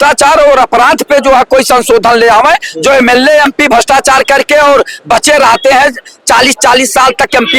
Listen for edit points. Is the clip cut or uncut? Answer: uncut